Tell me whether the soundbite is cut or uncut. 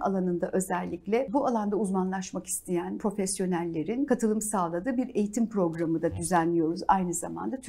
cut